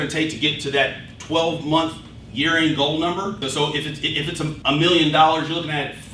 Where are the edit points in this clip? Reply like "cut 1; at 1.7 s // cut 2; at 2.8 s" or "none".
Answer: cut 1; at 3.4 s